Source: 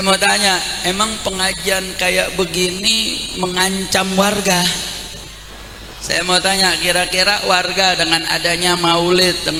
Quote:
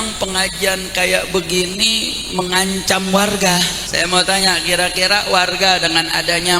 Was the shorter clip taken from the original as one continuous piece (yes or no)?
no